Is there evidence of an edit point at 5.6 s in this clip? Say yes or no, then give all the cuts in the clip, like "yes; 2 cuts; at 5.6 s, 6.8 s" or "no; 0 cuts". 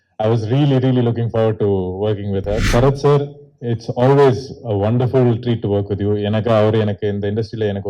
no; 1 cut; at 2.6 s